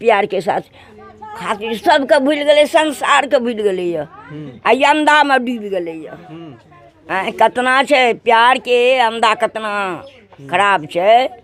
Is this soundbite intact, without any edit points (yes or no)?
yes